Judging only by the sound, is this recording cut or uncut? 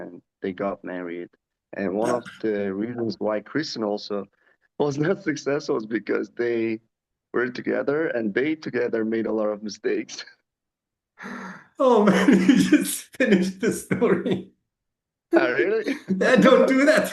uncut